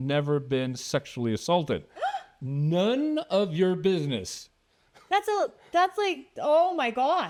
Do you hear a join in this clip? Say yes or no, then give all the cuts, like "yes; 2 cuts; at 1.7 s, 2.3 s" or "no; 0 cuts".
no; 0 cuts